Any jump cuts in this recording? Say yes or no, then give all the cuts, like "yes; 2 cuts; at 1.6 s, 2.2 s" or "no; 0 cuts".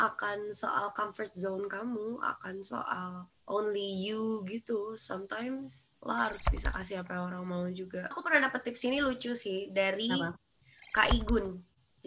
no; 0 cuts